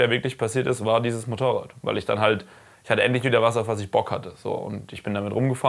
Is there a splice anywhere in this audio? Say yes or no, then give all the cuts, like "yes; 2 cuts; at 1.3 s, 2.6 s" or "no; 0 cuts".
no; 0 cuts